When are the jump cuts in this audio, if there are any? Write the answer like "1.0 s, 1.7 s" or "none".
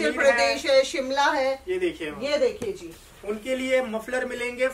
none